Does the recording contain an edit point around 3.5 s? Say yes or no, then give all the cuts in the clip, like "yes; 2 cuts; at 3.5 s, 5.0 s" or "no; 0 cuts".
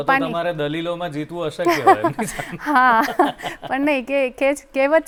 no; 0 cuts